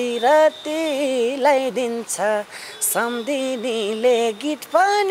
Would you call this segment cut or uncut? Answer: uncut